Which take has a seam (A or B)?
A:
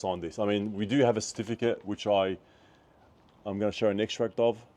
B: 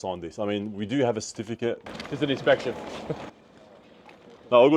B